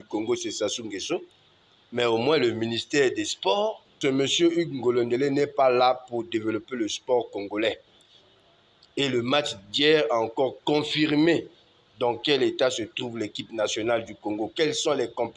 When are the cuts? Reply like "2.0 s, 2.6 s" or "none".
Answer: 3.9 s